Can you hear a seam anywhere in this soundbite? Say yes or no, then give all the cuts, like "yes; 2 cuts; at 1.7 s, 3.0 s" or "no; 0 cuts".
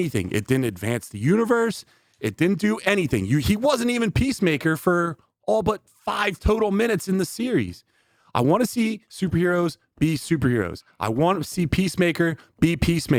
no; 0 cuts